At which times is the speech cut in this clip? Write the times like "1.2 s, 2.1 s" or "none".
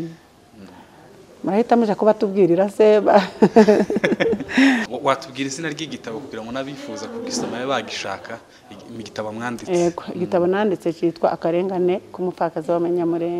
4.9 s